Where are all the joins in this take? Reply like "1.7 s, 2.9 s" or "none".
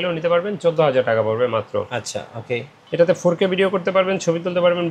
2.8 s